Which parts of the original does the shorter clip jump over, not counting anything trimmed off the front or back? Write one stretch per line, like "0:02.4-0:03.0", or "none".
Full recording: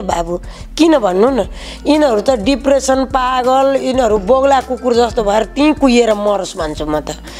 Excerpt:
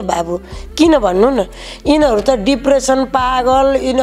none